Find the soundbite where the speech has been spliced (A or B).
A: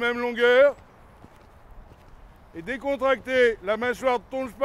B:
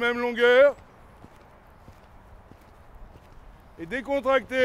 A